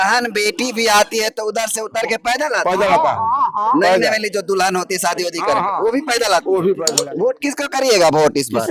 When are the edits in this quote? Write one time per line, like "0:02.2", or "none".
0:07.0